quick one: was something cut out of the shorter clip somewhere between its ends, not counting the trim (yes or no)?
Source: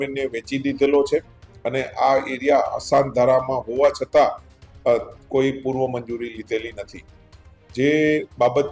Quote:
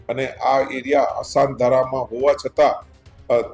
no